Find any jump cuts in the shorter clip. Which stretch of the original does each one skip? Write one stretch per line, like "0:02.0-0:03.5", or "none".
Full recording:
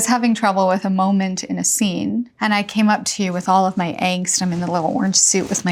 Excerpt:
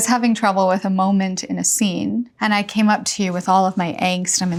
none

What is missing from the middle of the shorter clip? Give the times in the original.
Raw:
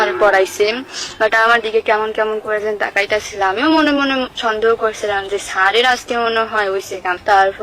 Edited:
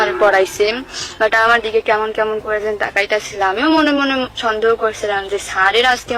none

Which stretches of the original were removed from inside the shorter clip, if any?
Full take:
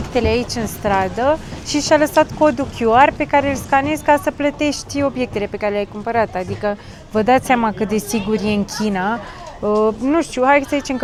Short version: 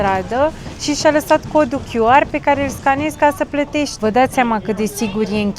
0:04.8-0:07.1

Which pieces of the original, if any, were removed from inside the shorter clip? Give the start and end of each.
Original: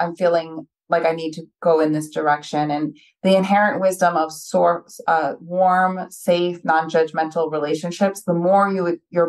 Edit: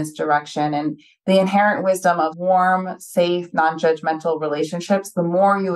0:04.3-0:05.5

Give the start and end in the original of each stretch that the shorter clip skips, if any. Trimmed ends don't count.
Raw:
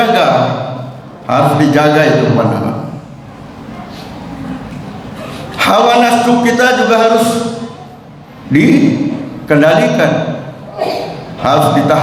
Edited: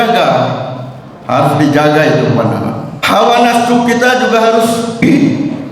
0:02.9-0:05.5
0:07.6-0:08.6

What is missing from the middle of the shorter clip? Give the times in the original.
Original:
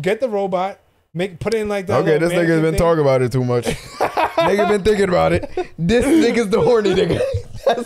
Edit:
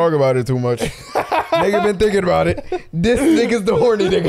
none

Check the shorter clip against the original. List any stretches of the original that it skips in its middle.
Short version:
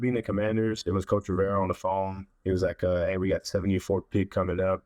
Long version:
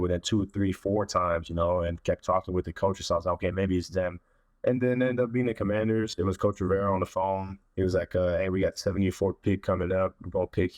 none

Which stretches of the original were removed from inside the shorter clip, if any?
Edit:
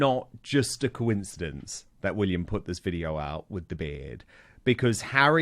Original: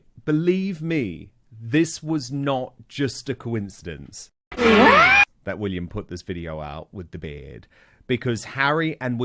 0:04.4-0:05.4

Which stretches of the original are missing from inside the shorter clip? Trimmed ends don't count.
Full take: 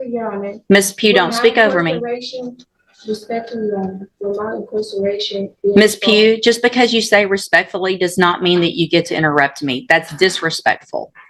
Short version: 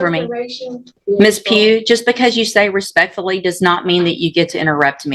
0:02.6-0:05.5

